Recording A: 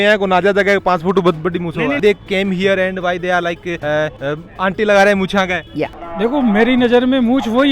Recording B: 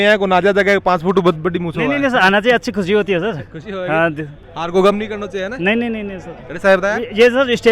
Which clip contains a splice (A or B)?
A